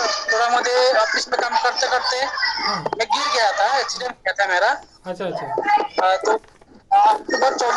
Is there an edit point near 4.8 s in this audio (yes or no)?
no